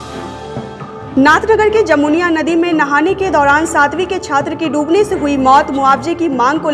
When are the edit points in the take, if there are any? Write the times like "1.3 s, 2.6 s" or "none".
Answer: 0.9 s